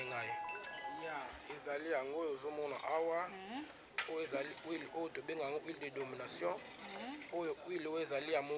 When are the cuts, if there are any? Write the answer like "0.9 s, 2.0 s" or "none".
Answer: 1.0 s